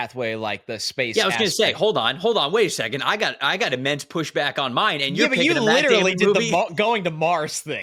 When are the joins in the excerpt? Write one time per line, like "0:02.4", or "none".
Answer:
none